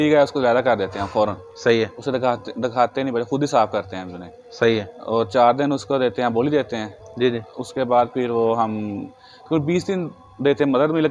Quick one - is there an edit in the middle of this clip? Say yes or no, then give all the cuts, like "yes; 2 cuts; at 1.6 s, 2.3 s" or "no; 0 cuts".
no; 0 cuts